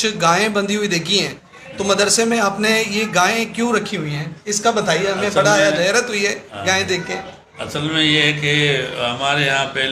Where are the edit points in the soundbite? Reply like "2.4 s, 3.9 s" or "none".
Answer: none